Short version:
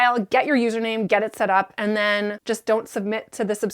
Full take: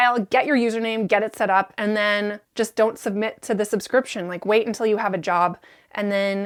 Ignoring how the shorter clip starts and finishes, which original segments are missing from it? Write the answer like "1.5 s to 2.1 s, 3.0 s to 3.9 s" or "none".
2.4 s to 2.5 s